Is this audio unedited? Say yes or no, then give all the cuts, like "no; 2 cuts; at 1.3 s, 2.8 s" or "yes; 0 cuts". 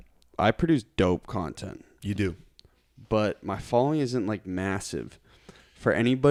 yes; 0 cuts